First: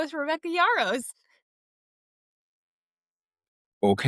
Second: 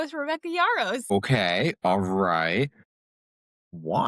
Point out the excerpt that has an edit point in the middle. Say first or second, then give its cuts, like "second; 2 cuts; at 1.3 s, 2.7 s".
second; 1 cut; at 1.1 s